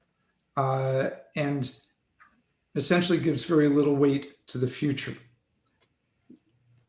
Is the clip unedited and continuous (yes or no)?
yes